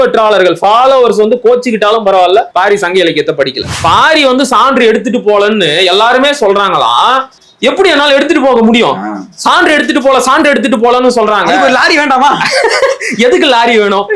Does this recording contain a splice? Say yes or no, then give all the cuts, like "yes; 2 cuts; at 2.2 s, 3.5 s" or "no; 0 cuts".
yes; 1 cut; at 3.7 s